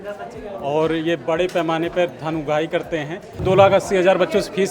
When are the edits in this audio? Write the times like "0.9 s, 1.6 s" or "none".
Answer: 3.4 s